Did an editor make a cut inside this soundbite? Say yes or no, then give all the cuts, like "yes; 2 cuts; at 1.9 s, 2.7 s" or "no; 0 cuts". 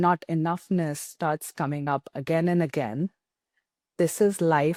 no; 0 cuts